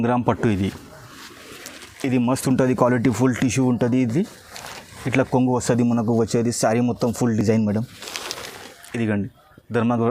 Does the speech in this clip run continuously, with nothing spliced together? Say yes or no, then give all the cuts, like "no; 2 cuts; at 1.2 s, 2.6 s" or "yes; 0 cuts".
yes; 0 cuts